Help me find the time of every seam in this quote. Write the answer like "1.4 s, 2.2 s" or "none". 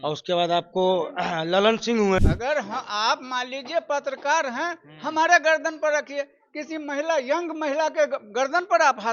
2.3 s